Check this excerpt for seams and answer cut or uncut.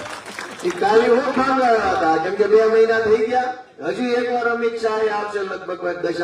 uncut